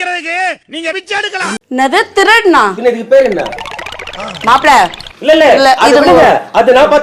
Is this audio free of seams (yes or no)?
no